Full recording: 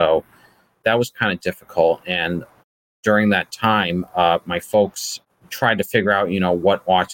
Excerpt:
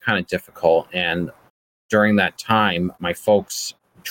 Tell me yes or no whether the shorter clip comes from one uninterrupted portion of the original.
no